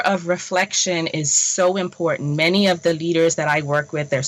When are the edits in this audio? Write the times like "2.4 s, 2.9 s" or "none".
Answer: none